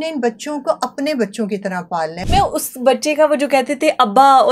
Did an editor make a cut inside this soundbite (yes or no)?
yes